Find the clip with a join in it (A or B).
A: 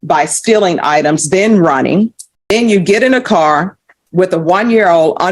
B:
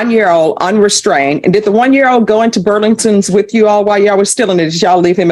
A